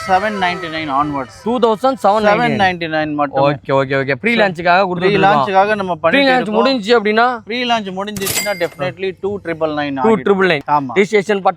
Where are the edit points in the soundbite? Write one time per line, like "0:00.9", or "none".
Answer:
0:10.6